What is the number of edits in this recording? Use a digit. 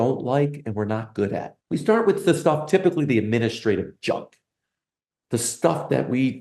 1